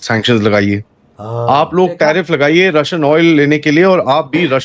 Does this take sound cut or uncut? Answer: uncut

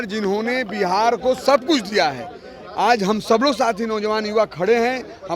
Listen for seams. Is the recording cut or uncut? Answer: uncut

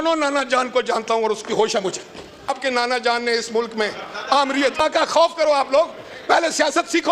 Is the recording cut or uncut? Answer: cut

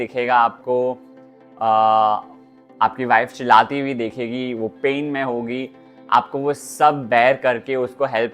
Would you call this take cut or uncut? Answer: uncut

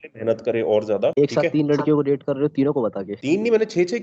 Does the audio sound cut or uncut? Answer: cut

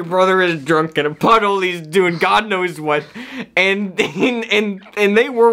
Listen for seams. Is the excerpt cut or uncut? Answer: uncut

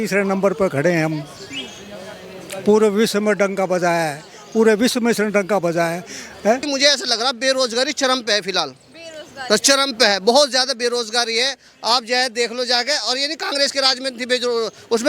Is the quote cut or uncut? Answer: cut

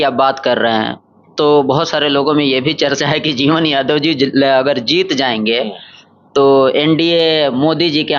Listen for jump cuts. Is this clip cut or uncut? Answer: uncut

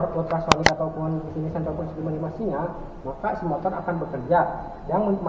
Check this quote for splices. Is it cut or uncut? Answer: uncut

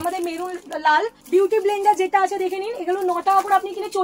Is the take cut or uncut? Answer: cut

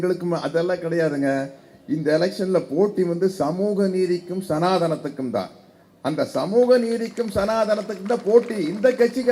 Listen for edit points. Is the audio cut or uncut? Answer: uncut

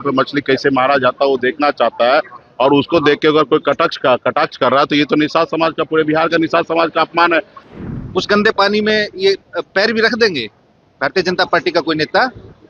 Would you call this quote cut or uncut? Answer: cut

